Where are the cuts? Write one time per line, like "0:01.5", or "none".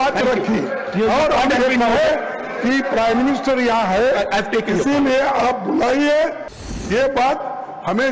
0:06.5